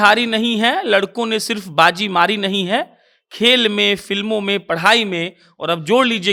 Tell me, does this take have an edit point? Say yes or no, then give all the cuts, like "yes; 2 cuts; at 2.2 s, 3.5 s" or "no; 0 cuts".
no; 0 cuts